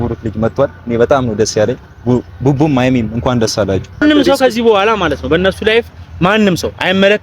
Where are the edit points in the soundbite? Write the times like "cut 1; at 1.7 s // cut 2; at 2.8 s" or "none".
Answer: cut 1; at 4.0 s